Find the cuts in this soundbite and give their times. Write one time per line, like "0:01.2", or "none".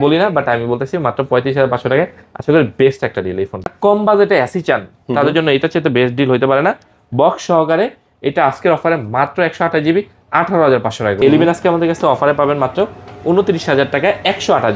0:03.7
0:11.2